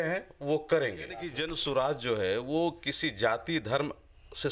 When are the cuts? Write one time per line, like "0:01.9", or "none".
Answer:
0:01.4